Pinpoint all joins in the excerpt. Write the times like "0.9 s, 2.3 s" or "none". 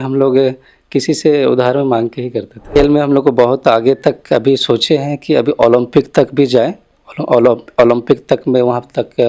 2.6 s